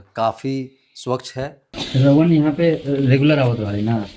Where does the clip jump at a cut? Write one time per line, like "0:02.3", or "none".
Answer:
0:01.7